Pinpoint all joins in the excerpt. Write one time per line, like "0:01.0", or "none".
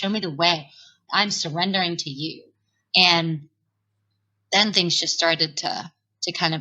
0:01.0